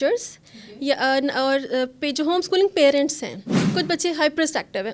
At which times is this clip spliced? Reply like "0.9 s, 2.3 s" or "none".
3.6 s